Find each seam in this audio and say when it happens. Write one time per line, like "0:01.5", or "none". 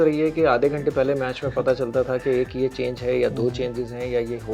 none

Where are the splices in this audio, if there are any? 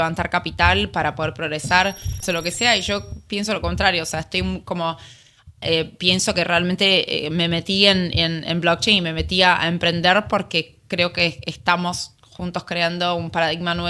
0:02.2

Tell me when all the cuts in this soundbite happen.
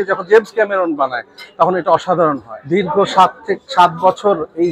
0:02.5

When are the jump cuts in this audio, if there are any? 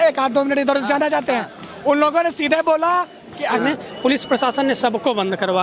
0:03.6

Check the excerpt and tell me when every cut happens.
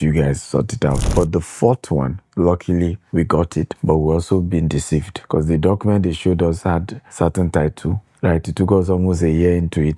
0:01.0
0:02.2
0:03.0
0:05.2
0:07.0

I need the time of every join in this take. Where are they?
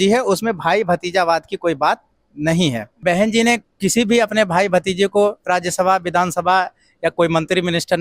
0:03.0

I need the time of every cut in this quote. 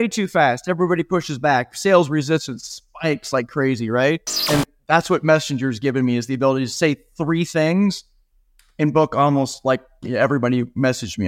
0:04.3

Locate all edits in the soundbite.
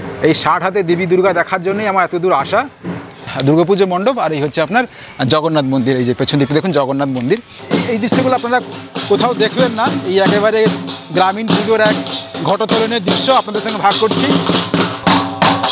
0:03.3
0:07.5

